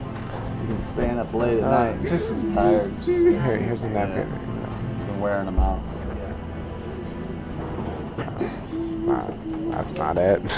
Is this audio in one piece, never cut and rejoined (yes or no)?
yes